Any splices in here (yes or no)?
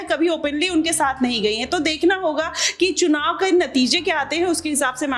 no